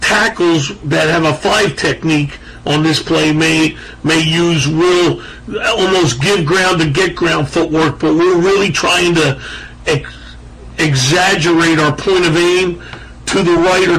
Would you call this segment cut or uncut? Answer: cut